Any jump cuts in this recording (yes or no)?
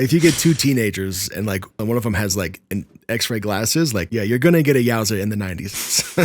yes